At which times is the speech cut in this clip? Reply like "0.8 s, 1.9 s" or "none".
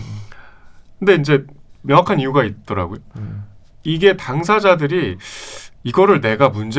none